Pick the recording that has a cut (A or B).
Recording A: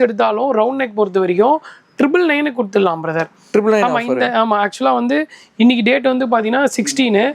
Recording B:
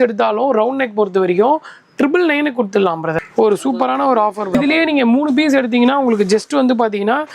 B